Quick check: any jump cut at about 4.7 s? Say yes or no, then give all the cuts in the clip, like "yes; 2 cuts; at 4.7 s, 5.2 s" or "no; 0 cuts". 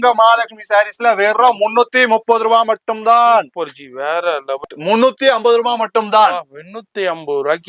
yes; 1 cut; at 4.7 s